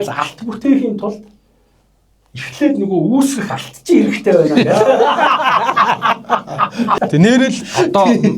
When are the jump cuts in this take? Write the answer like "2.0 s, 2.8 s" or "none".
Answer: 6.9 s